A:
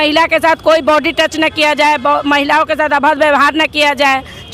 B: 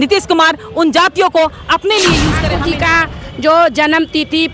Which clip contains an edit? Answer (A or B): B